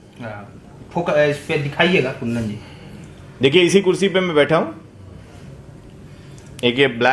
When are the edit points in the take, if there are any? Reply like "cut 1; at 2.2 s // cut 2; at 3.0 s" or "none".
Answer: none